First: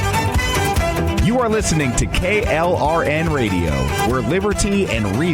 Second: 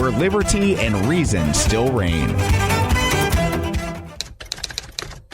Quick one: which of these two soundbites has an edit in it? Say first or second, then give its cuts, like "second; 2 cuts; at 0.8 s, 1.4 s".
second; 1 cut; at 4.0 s